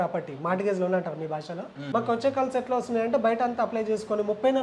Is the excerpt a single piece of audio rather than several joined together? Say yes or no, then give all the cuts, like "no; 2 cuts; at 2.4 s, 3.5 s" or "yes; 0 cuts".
no; 1 cut; at 1.7 s